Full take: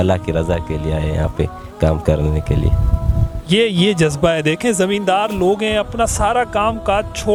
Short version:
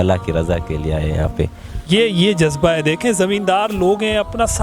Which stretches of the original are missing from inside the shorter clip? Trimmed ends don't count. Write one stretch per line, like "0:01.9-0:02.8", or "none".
0:01.6-0:03.2